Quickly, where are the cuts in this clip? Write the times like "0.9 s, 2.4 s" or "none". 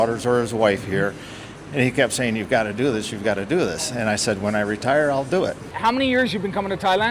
5.7 s